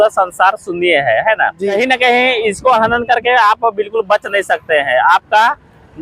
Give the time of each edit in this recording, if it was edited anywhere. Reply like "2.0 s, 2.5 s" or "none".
1.6 s